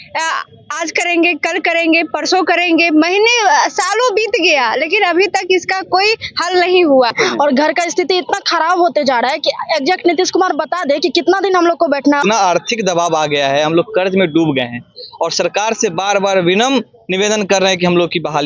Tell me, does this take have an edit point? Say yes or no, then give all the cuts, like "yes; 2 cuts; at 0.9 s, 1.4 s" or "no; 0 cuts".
yes; 2 cuts; at 7.1 s, 12.2 s